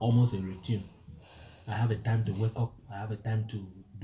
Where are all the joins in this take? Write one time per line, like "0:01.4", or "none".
none